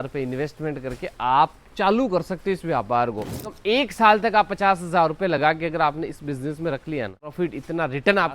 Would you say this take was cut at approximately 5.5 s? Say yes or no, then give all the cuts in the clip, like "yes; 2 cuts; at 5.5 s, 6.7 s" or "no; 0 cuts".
no; 2 cuts; at 3.5 s, 7.3 s